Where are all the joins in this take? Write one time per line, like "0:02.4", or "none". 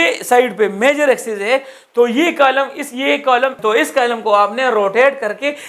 0:03.6